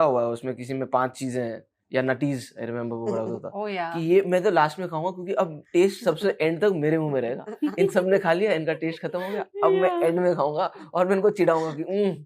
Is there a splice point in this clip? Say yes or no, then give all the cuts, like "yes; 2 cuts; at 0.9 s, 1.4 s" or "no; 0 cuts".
no; 0 cuts